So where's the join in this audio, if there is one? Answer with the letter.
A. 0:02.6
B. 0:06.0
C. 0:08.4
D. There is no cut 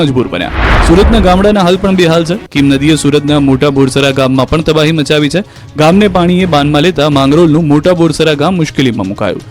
D